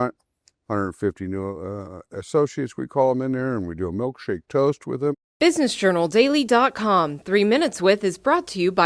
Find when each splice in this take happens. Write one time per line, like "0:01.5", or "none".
0:05.1